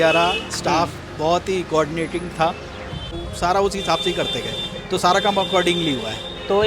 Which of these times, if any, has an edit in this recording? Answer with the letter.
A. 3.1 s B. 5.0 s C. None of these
A